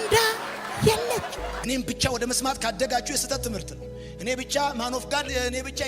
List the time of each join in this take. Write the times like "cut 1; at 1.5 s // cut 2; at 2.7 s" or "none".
cut 1; at 1.6 s